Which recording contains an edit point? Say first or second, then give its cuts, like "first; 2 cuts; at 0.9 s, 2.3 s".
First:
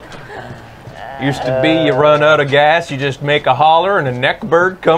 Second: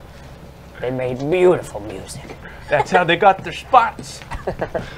second; 1 cut; at 1.9 s